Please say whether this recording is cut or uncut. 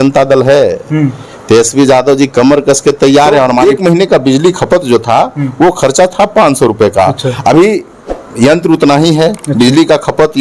cut